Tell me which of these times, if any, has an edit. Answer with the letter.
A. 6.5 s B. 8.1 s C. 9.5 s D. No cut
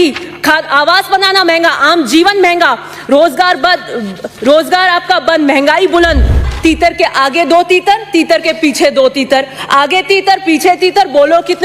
A